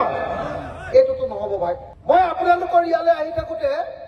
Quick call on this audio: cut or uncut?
uncut